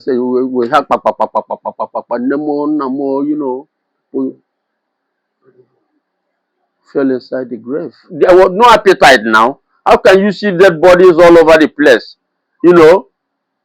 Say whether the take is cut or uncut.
cut